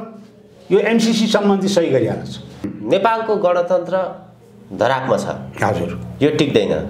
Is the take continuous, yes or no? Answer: no